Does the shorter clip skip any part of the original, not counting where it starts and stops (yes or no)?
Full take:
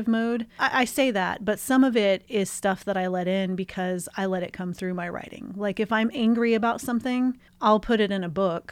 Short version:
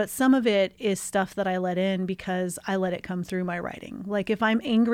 no